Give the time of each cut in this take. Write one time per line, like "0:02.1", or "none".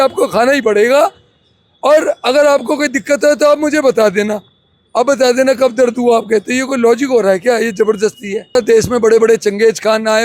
0:08.6